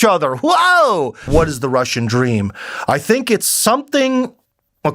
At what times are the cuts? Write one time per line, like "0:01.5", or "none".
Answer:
0:01.3